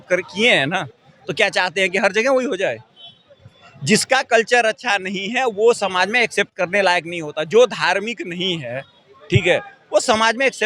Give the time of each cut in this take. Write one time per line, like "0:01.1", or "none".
none